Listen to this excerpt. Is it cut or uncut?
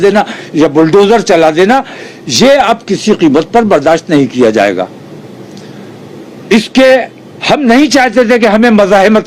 uncut